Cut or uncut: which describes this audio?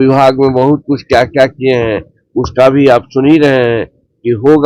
uncut